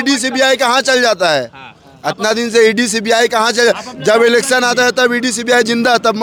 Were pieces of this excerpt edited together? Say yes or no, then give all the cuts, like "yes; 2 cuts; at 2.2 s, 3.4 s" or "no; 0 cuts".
no; 0 cuts